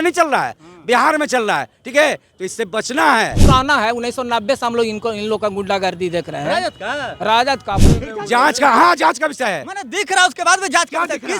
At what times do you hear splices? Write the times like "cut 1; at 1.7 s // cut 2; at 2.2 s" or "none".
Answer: cut 1; at 3.4 s // cut 2; at 7.9 s